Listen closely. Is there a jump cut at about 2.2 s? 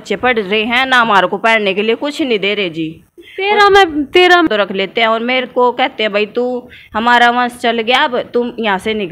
no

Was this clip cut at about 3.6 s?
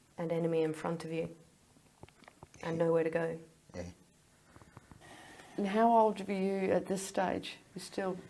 no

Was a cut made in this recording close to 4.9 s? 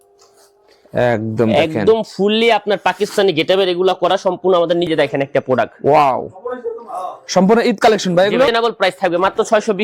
yes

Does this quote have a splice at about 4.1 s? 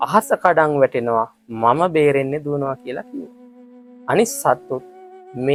no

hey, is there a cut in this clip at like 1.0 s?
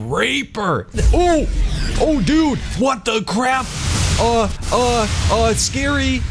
yes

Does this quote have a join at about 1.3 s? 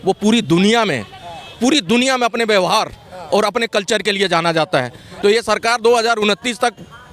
no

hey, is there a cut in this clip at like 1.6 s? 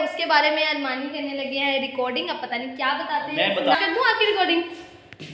no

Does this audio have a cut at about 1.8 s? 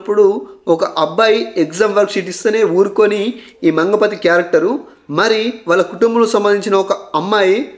no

